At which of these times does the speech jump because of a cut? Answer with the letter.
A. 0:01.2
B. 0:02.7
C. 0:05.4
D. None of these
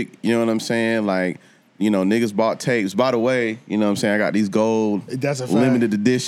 D